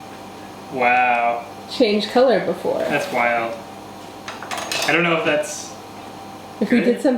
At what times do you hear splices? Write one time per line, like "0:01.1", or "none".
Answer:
none

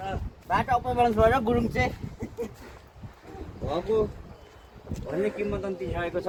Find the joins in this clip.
none

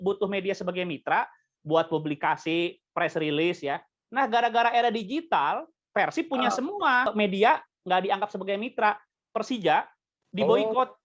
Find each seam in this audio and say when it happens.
0:07.1
0:09.2

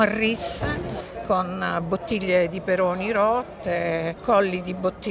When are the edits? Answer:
0:04.1

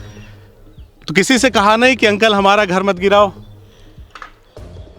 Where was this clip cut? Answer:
0:01.0
0:03.5

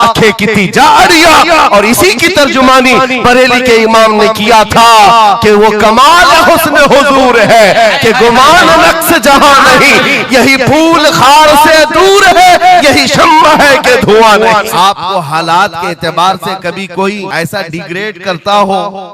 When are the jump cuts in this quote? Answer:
0:14.7
0:17.3

